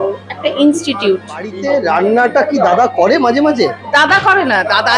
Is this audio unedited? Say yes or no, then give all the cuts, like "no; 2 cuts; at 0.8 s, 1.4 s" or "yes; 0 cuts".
no; 1 cut; at 1.5 s